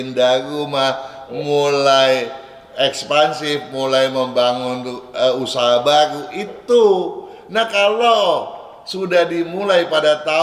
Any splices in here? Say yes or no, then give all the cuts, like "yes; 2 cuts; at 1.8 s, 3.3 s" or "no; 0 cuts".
no; 0 cuts